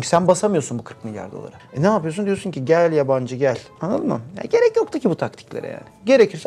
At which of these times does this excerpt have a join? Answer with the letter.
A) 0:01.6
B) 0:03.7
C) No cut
B